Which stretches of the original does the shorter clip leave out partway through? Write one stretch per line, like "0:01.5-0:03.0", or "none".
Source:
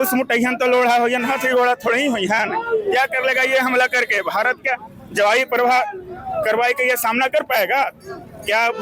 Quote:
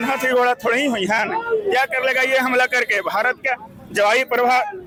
none